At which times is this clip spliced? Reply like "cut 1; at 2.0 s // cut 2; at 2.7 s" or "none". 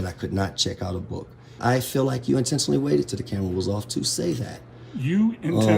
cut 1; at 1.6 s